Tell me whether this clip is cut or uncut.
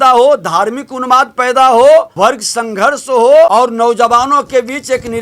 cut